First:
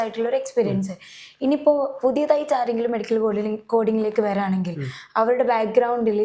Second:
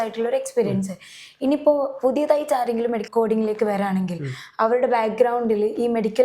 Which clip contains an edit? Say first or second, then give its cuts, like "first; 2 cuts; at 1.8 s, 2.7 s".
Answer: second; 1 cut; at 3.0 s